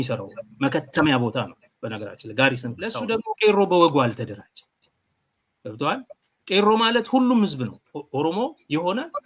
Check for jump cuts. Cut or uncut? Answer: cut